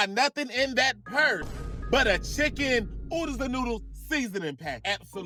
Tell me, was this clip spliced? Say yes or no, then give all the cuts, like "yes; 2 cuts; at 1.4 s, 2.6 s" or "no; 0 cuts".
no; 0 cuts